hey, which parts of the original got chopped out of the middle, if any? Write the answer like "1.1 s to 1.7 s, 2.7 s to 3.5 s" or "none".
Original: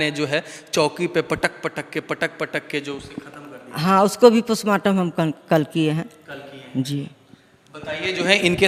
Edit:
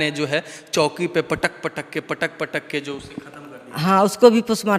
none